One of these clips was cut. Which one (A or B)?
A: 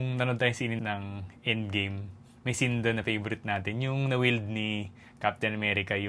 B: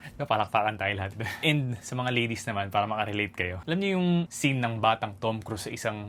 B